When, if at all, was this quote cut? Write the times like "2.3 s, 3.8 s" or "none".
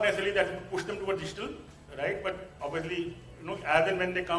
none